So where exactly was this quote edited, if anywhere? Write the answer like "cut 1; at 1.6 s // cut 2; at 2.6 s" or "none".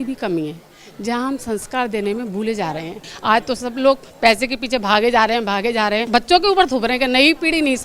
cut 1; at 3.1 s // cut 2; at 6.0 s